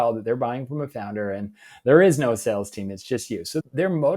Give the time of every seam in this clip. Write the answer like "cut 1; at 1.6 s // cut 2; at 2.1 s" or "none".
none

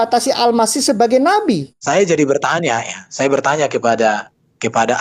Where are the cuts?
cut 1; at 1.7 s

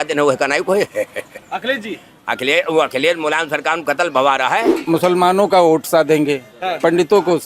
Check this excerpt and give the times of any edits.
cut 1; at 4.7 s

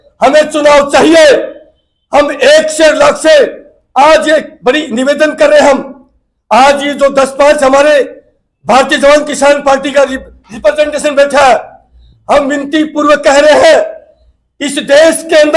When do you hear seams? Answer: none

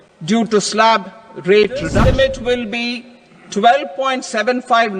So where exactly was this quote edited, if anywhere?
cut 1; at 1.9 s

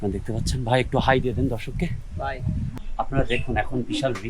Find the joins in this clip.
cut 1; at 2.7 s

